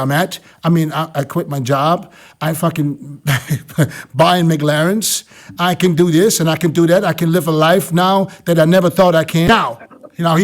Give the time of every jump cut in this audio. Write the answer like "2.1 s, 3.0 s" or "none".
9.5 s